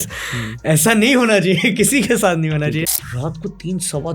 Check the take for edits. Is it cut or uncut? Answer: cut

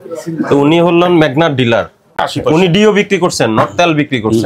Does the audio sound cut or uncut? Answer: cut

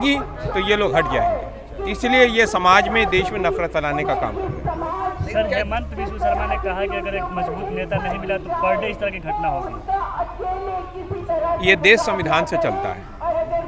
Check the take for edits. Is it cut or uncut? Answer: uncut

